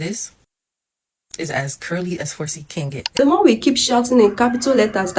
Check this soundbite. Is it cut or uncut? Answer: cut